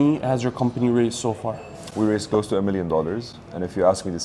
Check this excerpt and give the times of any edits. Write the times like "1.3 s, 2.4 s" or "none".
none